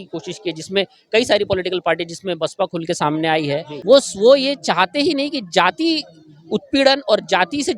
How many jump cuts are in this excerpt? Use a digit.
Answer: 1